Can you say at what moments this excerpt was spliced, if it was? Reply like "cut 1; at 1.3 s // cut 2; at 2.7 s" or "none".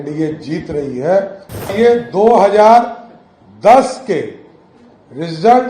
cut 1; at 1.7 s